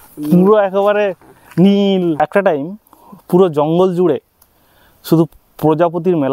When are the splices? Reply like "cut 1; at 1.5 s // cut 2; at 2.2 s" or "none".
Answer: cut 1; at 2.2 s